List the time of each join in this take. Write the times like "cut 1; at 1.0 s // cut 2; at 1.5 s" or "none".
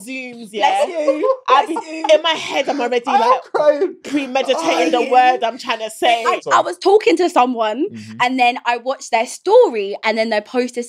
cut 1; at 6.4 s